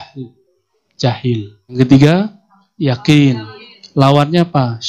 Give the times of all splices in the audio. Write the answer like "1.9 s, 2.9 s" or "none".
1.8 s